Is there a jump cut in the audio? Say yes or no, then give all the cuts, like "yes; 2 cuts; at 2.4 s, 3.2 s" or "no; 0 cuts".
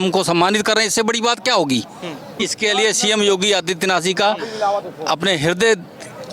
yes; 1 cut; at 2.4 s